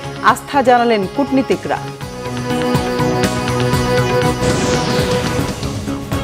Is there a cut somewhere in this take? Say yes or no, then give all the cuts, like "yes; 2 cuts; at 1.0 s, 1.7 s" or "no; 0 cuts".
yes; 1 cut; at 5.3 s